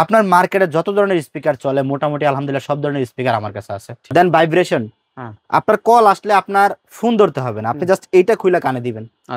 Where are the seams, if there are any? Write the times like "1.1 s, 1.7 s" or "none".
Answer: 4.0 s